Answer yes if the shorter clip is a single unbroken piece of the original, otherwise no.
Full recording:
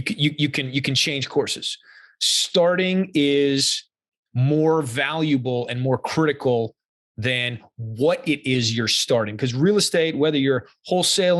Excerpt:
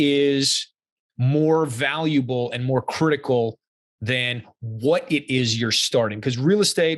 yes